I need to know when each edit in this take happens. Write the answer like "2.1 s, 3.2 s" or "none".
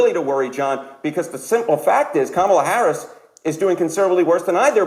none